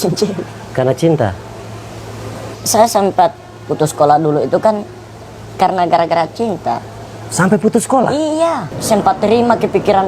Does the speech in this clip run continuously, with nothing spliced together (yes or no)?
no